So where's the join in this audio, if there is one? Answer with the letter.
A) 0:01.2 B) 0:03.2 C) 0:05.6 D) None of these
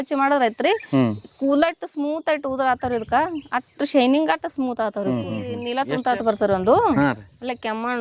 C